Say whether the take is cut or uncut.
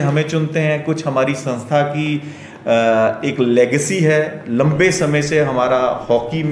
uncut